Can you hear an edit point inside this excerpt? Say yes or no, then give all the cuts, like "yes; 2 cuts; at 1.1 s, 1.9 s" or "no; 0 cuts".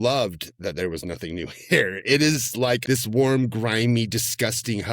yes; 1 cut; at 2.8 s